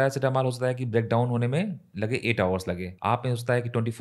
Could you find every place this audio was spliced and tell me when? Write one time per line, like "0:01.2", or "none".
0:02.9